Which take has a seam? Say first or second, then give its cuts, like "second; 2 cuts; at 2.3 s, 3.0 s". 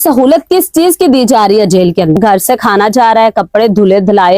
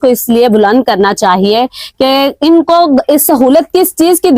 first; 1 cut; at 2.2 s